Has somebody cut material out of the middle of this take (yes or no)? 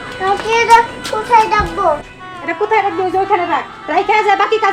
no